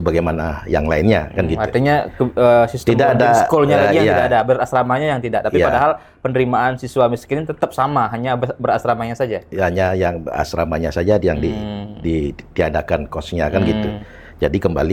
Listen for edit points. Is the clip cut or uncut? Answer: uncut